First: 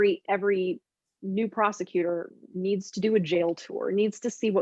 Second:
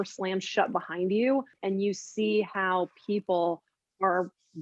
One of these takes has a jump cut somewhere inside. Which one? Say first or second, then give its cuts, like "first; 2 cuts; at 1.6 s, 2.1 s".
second; 1 cut; at 1.5 s